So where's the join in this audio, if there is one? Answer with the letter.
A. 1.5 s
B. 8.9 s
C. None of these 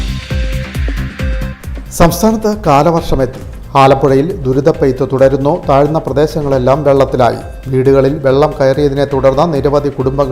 A